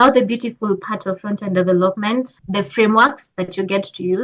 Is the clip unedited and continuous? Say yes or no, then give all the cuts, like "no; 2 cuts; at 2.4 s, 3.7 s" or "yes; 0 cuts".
no; 1 cut; at 2.4 s